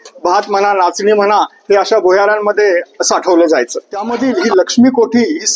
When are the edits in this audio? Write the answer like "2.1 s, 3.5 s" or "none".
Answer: 3.7 s